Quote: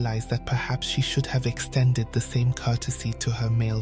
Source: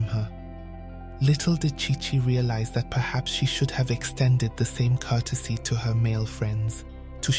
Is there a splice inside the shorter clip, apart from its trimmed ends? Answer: no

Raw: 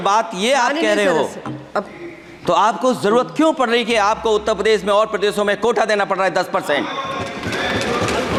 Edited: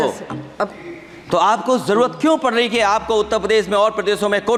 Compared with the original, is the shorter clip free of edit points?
yes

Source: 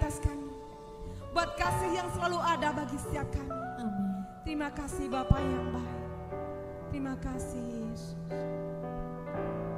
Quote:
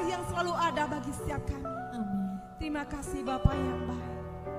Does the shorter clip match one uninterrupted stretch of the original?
yes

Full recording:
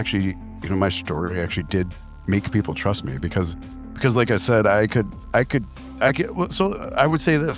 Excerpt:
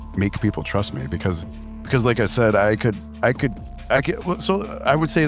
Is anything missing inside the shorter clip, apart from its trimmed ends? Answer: no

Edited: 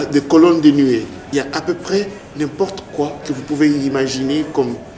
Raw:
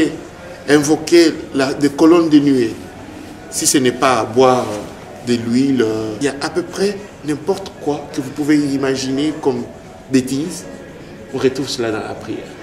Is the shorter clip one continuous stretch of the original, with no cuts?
no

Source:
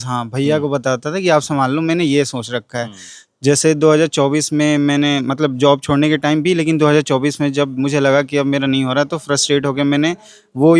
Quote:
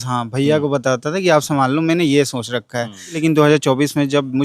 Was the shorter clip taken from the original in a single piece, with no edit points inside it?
no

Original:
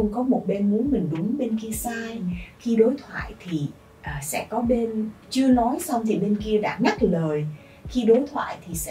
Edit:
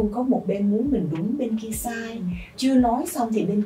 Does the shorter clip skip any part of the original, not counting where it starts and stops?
yes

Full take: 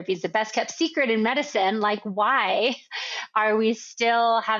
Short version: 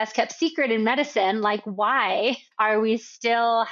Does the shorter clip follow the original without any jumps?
no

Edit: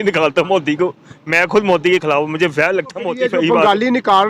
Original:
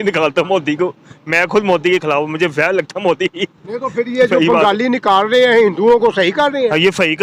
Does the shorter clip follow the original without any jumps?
no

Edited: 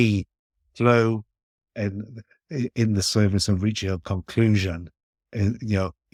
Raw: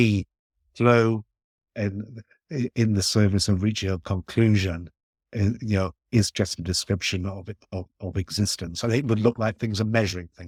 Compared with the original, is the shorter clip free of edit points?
yes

